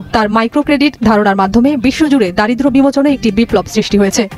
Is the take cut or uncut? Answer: uncut